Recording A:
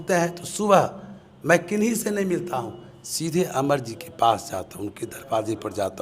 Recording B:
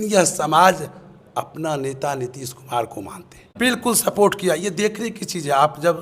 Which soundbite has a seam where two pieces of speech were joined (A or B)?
B